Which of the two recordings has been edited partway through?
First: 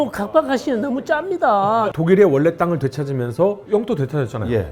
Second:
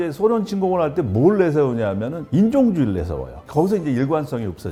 first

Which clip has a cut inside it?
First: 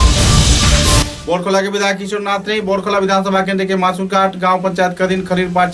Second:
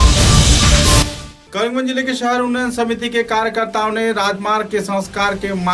second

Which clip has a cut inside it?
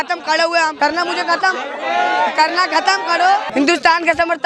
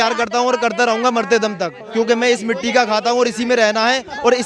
first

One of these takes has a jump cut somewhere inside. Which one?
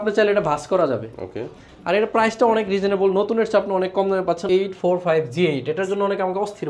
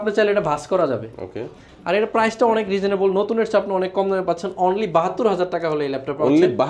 first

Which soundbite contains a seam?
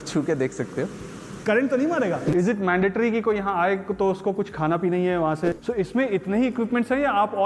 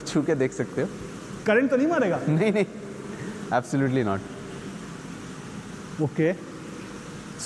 first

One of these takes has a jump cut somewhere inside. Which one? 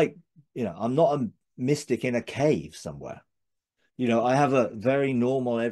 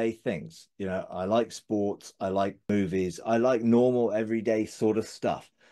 second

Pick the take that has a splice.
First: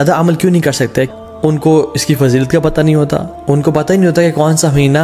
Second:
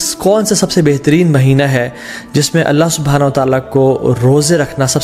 first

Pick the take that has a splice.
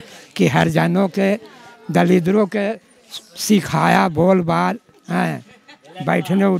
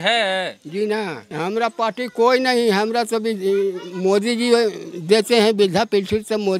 second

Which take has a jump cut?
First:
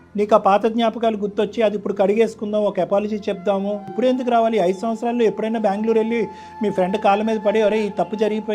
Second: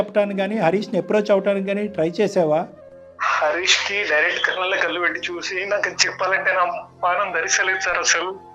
first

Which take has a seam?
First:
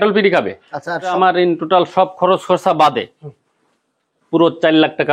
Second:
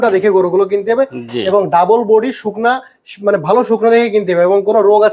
first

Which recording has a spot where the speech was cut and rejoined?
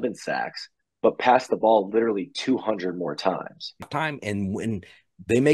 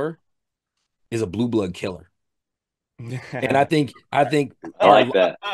first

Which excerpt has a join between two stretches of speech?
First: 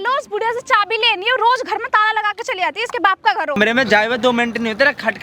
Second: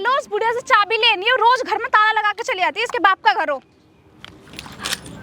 first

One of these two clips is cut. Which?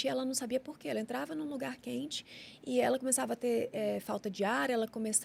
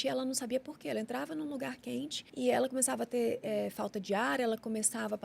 second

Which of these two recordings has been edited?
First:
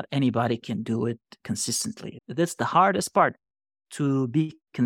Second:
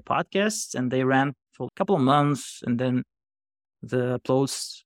first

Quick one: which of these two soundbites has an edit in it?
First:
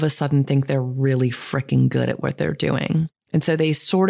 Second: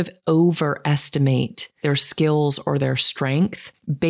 second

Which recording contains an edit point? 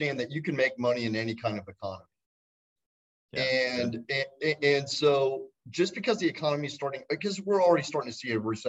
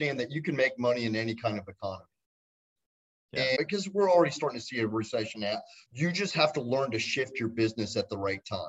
second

